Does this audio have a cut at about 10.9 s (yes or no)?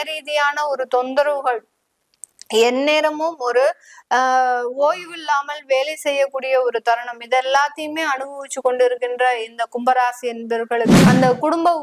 yes